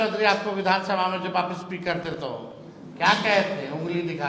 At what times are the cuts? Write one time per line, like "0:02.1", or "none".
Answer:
none